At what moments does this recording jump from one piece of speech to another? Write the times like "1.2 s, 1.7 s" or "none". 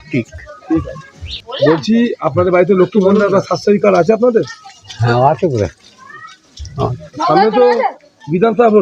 none